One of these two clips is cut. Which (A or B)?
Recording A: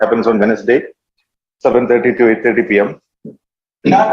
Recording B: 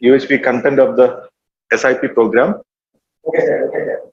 A